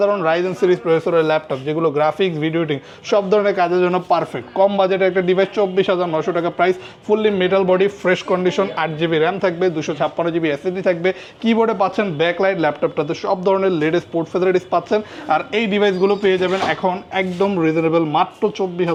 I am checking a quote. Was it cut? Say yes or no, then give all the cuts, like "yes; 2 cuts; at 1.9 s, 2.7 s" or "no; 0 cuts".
no; 0 cuts